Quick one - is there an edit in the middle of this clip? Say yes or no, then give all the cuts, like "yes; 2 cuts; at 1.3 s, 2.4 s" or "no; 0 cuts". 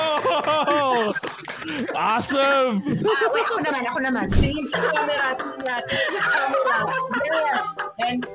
yes; 1 cut; at 4.4 s